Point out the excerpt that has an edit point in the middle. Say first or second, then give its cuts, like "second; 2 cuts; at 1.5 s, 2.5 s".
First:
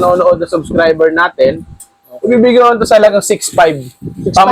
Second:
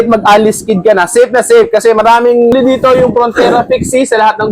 second; 1 cut; at 2.5 s